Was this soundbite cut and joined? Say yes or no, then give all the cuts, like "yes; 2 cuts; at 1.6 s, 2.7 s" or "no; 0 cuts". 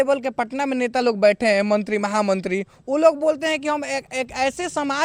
no; 0 cuts